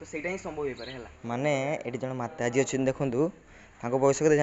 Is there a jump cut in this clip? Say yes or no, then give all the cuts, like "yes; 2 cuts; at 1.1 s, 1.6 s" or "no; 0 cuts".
yes; 1 cut; at 1.1 s